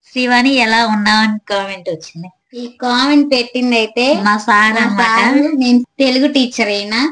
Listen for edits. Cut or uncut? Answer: cut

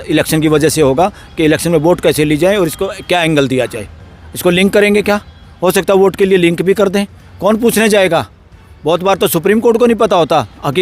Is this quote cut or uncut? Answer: cut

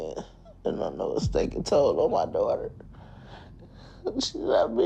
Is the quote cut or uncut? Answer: uncut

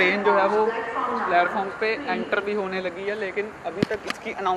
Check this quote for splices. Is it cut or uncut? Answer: uncut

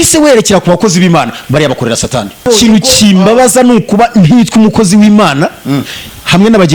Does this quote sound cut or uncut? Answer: cut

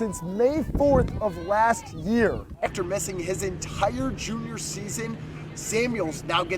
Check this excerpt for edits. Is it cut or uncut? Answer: cut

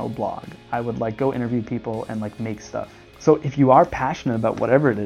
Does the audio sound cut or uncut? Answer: cut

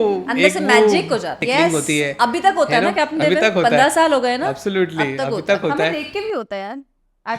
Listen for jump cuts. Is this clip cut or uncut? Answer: cut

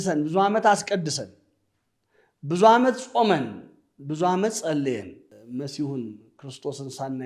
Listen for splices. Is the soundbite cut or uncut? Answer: cut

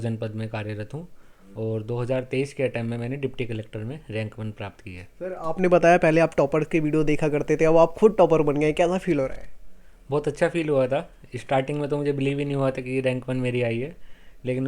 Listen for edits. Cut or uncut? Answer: uncut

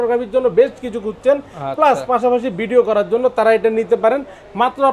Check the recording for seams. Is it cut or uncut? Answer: uncut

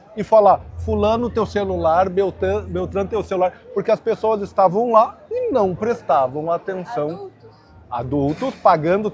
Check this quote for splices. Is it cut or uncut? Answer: uncut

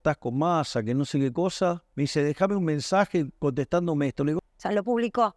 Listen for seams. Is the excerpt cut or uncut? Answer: cut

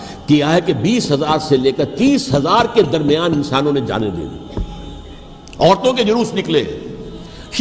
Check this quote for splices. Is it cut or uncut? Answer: uncut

